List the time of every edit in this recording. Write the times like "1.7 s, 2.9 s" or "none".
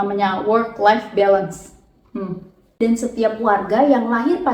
2.6 s